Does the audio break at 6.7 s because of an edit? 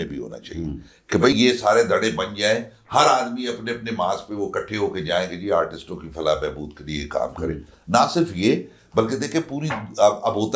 no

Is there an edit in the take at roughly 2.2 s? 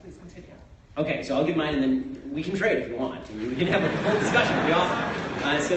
yes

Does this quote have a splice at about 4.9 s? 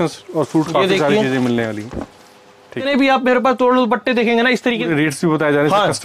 yes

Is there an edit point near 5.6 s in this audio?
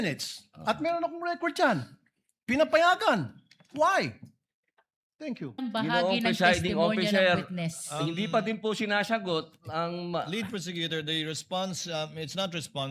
yes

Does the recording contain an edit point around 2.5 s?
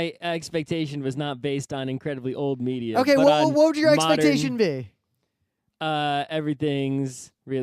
yes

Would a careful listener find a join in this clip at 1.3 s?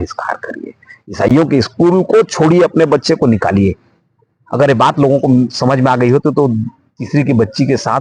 no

